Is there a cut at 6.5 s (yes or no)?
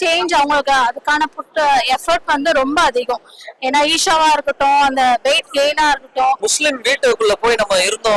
yes